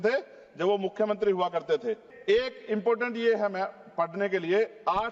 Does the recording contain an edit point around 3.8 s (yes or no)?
no